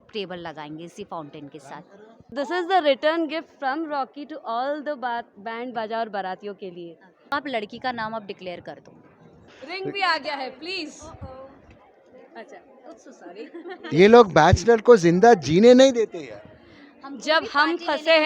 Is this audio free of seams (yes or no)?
no